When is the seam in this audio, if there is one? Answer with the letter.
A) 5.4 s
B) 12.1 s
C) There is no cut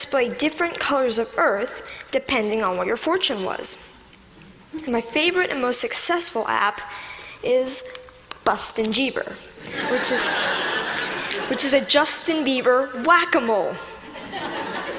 B